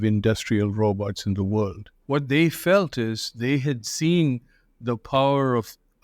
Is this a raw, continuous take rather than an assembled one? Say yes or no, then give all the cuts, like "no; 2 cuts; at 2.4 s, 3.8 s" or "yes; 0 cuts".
no; 1 cut; at 1.9 s